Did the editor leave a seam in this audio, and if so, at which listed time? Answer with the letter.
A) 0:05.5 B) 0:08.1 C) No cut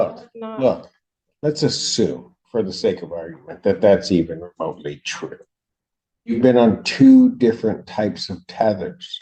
C